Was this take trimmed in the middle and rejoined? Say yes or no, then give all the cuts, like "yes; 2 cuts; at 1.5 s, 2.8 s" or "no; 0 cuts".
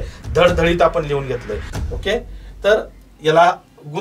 yes; 1 cut; at 1.7 s